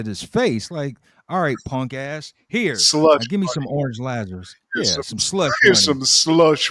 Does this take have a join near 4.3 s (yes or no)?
no